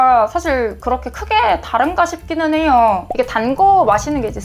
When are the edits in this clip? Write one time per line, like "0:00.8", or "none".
0:03.1